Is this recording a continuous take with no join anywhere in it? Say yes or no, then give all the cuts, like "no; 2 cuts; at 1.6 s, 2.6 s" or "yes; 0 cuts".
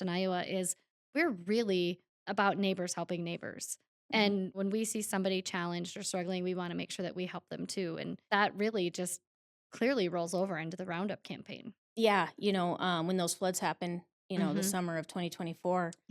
no; 2 cuts; at 4.6 s, 8.2 s